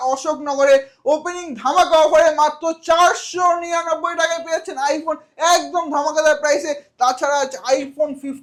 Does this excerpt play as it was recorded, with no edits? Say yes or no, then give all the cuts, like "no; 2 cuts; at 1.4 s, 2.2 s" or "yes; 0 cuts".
yes; 0 cuts